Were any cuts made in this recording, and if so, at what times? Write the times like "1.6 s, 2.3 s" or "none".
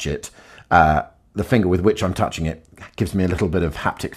none